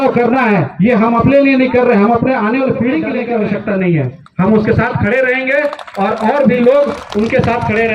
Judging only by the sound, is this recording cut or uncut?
cut